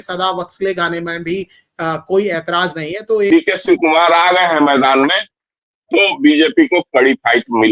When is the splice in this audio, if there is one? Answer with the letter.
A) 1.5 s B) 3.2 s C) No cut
B